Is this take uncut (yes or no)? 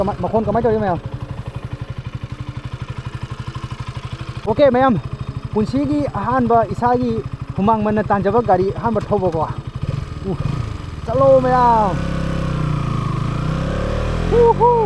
no